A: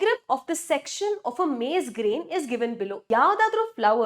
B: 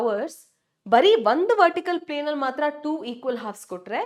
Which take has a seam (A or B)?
A